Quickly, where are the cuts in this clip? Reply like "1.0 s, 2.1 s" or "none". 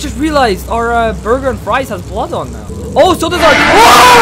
2.6 s